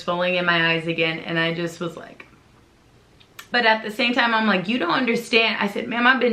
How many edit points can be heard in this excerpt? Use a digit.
1